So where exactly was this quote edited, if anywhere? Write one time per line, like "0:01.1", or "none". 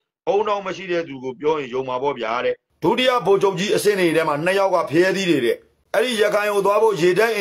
0:02.7
0:05.7